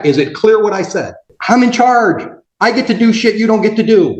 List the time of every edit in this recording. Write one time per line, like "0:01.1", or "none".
0:01.1